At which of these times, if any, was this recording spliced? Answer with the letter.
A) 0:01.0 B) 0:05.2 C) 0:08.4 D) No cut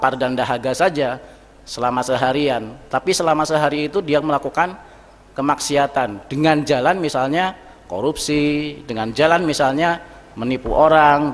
D